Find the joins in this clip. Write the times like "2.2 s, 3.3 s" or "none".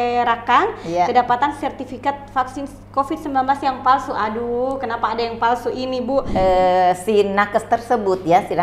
6.3 s